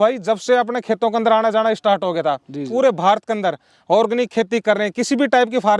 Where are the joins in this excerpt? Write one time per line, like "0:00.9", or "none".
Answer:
0:02.7